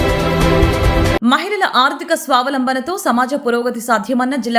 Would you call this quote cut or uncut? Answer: cut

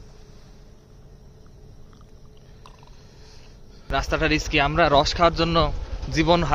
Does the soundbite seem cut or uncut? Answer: cut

